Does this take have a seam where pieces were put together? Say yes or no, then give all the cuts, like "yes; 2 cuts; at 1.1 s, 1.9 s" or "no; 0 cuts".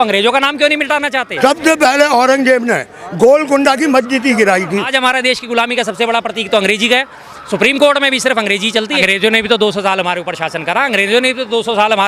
yes; 3 cuts; at 1.3 s, 4.9 s, 9.0 s